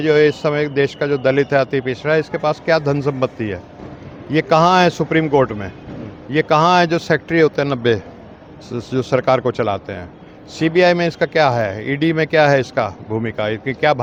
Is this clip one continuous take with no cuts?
yes; 0 cuts

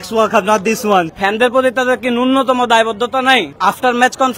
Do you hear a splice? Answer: yes; 2 cuts; at 1.1 s, 3.5 s

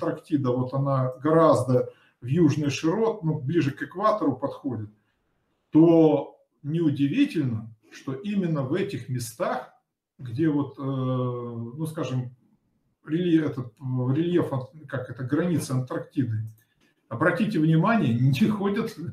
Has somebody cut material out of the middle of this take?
no; 0 cuts

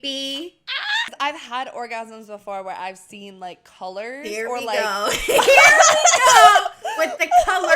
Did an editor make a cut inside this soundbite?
yes; 1 cut; at 1.1 s

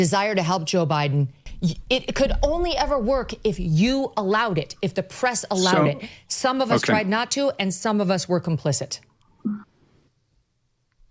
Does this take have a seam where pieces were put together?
yes; 1 cut; at 1.4 s

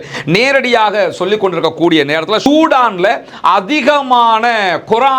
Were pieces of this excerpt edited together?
yes; 1 cut; at 2.5 s

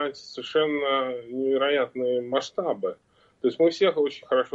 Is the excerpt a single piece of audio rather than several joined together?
yes; 0 cuts

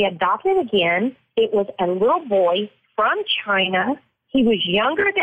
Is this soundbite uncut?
no; 1 cut; at 1.2 s

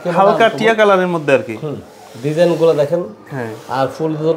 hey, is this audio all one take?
yes; 0 cuts

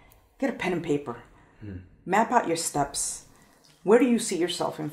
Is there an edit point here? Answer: no; 0 cuts

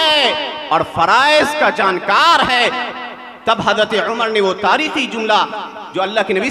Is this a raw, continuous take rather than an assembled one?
yes; 0 cuts

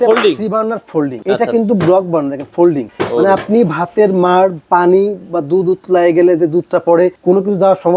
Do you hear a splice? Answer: no; 0 cuts

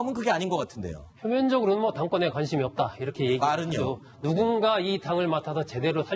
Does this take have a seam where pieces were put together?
yes; 1 cut; at 1.4 s

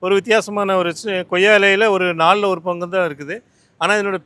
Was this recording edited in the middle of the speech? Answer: no; 0 cuts

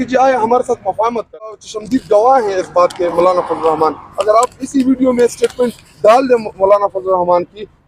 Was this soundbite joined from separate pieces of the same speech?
yes; 1 cut; at 1.7 s

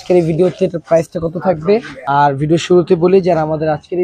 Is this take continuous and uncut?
no; 1 cut; at 1.9 s

